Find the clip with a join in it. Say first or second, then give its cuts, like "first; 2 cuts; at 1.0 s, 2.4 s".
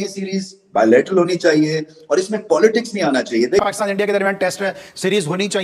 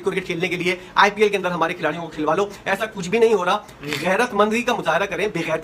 first; 1 cut; at 3.6 s